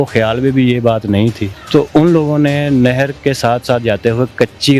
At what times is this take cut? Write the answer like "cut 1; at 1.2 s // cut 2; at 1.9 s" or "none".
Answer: cut 1; at 1.5 s